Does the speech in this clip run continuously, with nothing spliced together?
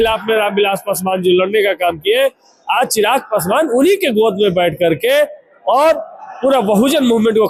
yes; 0 cuts

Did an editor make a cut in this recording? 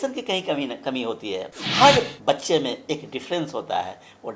yes; 1 cut; at 1.6 s

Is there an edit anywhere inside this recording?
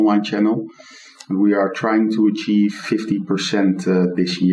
yes; 1 cut; at 2.8 s

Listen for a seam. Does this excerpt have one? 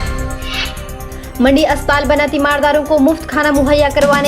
yes; 1 cut; at 1.0 s

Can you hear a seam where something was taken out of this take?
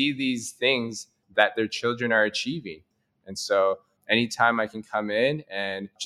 yes; 1 cut; at 2.8 s

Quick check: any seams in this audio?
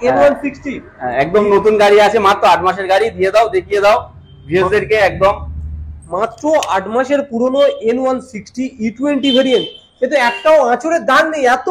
no; 0 cuts

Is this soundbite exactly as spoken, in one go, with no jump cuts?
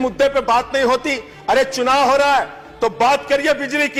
yes; 0 cuts

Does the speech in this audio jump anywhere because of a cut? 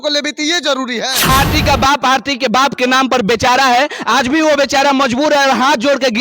yes; 1 cut; at 1.3 s

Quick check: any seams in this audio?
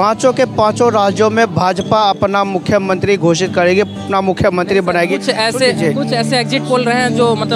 no; 0 cuts

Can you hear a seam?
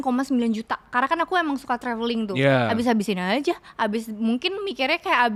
no; 0 cuts

